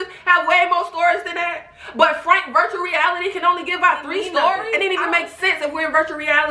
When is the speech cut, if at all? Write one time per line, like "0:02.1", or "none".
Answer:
0:04.8